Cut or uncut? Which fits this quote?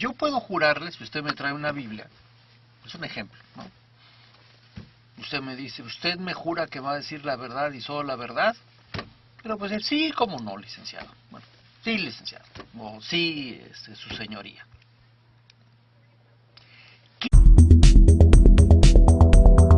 uncut